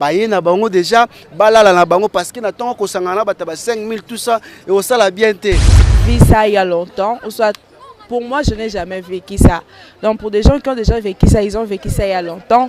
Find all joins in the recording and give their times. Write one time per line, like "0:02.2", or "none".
0:05.7